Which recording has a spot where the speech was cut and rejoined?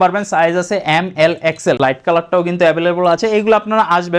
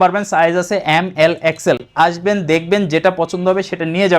first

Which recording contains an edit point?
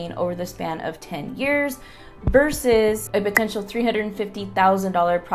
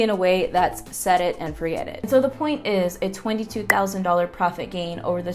second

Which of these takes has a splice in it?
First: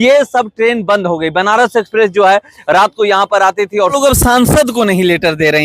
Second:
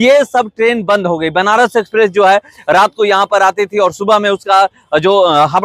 first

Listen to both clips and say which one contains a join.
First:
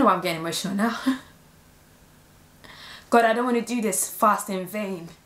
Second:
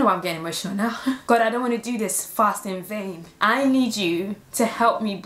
second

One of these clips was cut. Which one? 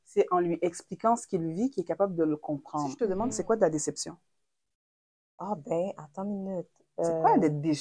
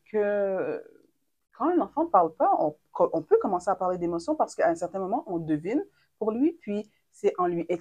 first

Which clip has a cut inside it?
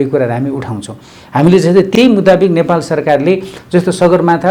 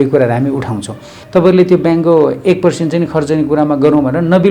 second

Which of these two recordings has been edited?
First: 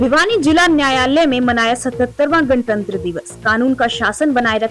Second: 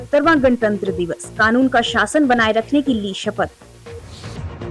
second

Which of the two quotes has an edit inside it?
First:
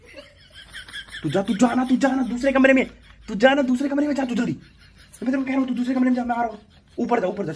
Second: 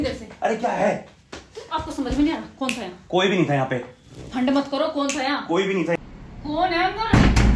second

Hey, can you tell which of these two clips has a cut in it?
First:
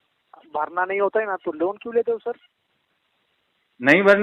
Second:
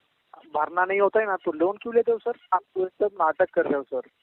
second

